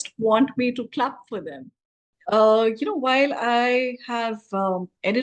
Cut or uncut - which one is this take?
cut